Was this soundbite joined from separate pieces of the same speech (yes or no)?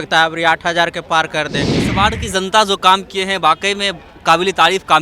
yes